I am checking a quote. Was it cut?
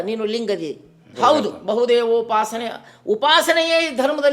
yes; 1 cut; at 1.0 s

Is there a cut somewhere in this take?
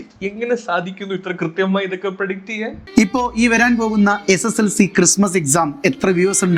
yes; 1 cut; at 2.8 s

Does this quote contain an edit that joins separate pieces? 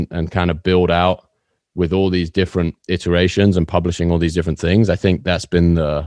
no; 0 cuts

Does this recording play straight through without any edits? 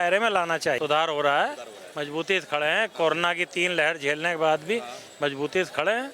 yes; 0 cuts

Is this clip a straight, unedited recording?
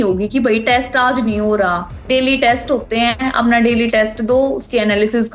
yes; 0 cuts

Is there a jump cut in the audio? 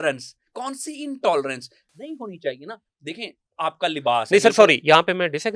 no; 0 cuts

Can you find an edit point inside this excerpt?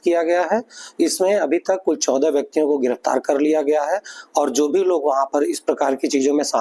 yes; 1 cut; at 1.1 s

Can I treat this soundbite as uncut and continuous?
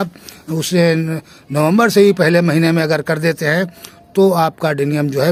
yes; 0 cuts

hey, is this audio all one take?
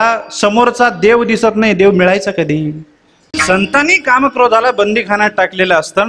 no; 1 cut; at 3.3 s

